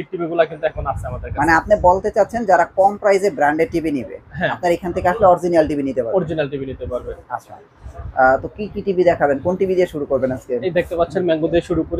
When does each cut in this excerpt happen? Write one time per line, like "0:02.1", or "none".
none